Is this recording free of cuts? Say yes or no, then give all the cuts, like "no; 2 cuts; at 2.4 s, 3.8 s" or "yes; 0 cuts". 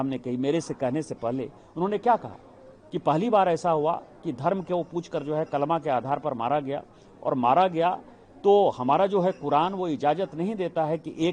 yes; 0 cuts